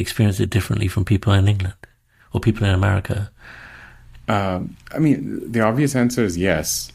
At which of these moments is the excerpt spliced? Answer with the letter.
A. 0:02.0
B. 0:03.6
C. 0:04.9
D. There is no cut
D